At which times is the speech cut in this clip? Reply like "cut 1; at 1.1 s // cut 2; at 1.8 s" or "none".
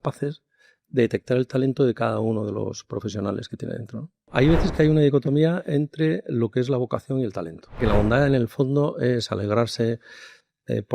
cut 1; at 4.3 s // cut 2; at 7.8 s